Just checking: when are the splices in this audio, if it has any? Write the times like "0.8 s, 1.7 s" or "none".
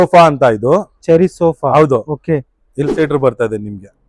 2.9 s

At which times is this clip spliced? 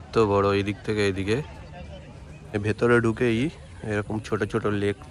2.6 s

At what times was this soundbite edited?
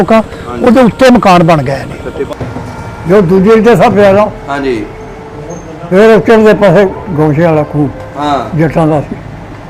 2.3 s

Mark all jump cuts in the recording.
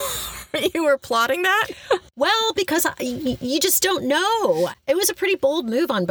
4.7 s

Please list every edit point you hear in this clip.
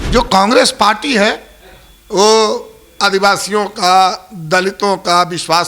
none

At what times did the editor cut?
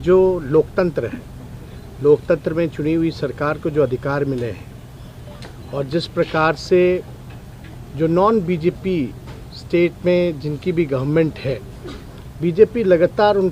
none

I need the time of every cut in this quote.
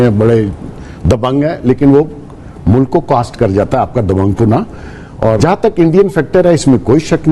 5.4 s

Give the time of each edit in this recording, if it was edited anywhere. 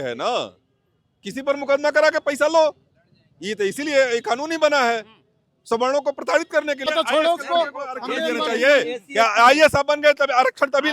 6.9 s

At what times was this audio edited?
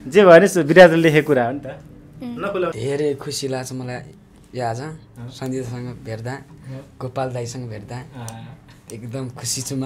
2.8 s

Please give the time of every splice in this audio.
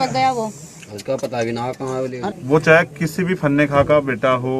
2.3 s

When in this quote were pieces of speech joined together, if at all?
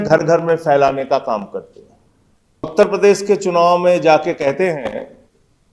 2.7 s

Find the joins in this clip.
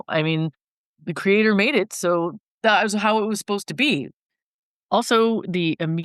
2.4 s

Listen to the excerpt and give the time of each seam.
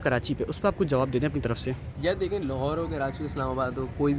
none

